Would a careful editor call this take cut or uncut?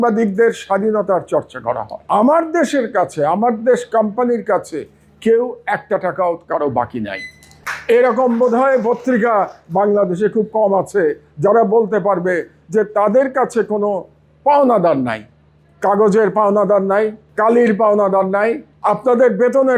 cut